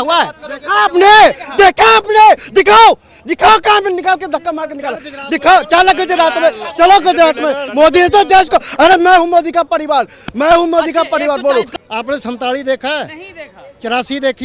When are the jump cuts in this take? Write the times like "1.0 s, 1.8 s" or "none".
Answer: 7.6 s, 11.7 s

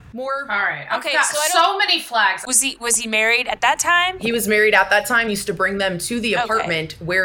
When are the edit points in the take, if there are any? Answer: 2.4 s

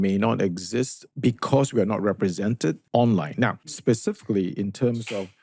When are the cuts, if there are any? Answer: 1.0 s, 2.8 s, 3.7 s

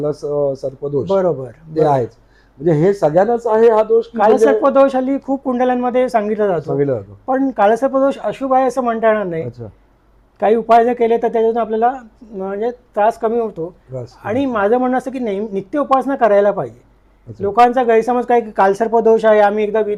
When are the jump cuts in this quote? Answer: none

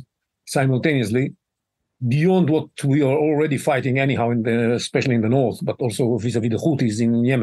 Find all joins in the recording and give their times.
none

